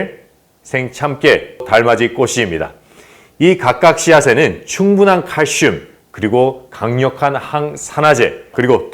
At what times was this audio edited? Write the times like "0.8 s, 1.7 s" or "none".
none

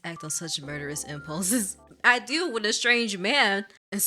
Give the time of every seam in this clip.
1.8 s

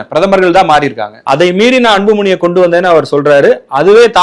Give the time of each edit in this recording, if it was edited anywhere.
1.1 s

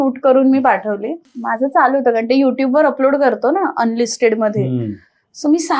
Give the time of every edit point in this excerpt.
1.4 s

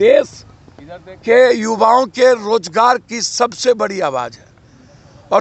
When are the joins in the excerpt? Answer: none

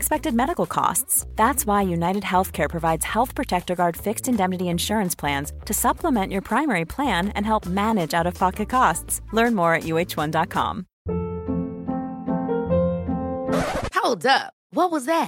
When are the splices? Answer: 10.9 s

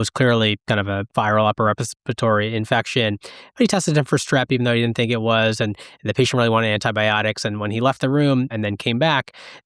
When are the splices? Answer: 8.5 s

